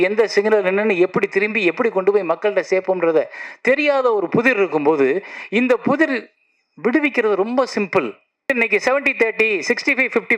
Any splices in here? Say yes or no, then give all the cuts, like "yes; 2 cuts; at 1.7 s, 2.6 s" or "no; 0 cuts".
yes; 1 cut; at 8.5 s